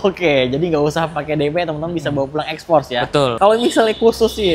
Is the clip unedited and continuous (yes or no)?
no